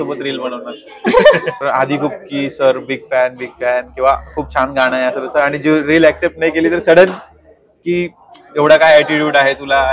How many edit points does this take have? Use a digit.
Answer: 1